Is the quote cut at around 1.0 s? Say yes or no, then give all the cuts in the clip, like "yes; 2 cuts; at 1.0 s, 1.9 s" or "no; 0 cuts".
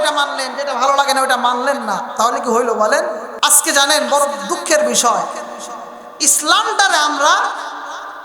no; 1 cut; at 3.3 s